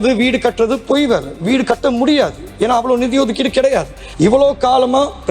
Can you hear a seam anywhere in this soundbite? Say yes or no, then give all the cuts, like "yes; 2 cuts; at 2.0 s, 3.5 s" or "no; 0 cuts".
yes; 1 cut; at 4.0 s